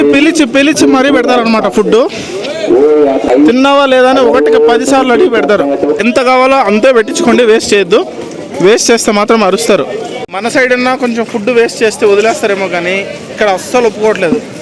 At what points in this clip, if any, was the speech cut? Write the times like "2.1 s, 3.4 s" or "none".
none